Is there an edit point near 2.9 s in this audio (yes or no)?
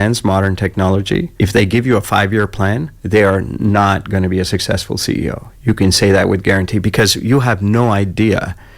yes